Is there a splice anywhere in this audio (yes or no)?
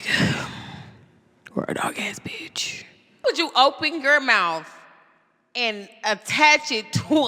yes